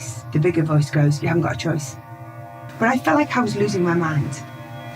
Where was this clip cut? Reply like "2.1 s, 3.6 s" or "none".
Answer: 3.0 s

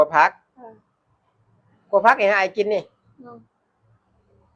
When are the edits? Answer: none

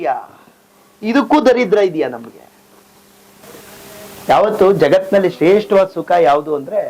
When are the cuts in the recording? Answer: 3.4 s

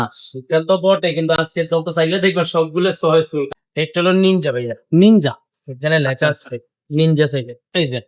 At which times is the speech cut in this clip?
3.5 s

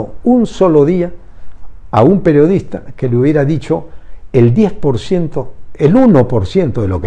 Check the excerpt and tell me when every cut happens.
none

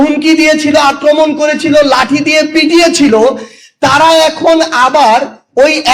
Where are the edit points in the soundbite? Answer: none

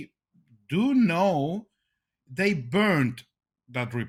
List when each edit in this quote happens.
none

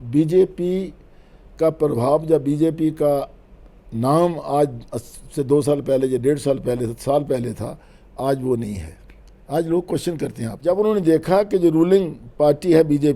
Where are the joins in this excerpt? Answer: 10.5 s

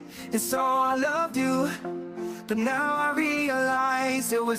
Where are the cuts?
none

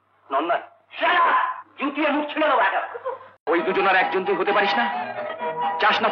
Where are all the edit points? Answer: 3.4 s

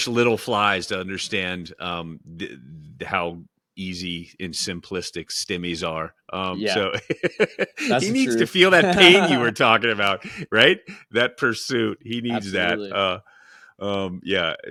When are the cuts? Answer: none

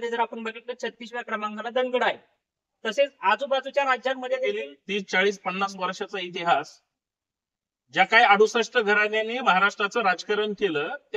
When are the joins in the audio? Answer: 4.7 s

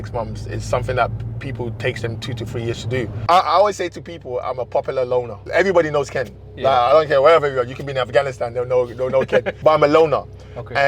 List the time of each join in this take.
3.2 s, 5.4 s, 9.5 s

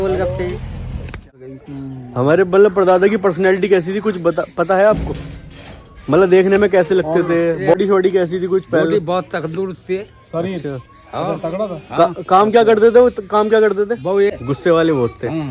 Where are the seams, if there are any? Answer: 1.3 s, 7.7 s, 14.3 s

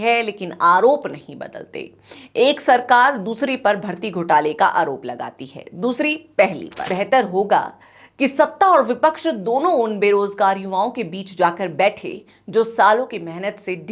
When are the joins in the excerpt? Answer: 6.8 s

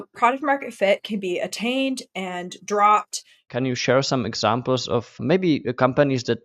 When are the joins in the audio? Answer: 3.5 s, 5.2 s

